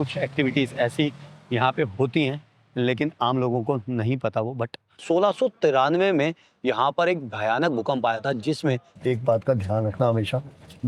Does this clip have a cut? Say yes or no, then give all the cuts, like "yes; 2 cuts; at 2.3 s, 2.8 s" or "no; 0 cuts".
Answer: yes; 2 cuts; at 4.9 s, 9.0 s